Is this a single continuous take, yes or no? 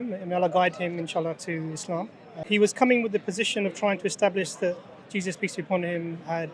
no